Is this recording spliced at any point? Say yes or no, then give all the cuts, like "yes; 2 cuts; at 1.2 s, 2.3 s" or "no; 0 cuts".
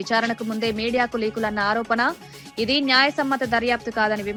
no; 0 cuts